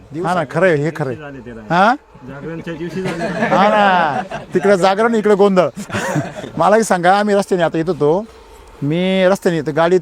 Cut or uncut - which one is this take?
uncut